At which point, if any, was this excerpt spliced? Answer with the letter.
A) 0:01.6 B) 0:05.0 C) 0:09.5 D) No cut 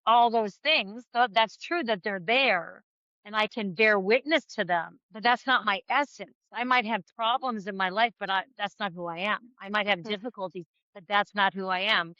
B